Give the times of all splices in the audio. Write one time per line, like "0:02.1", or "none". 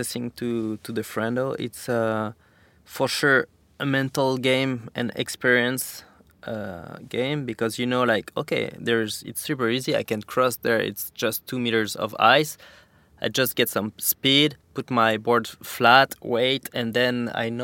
0:03.6